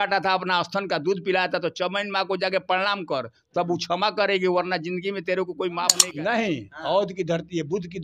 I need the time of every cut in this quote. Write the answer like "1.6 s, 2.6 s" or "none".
6.0 s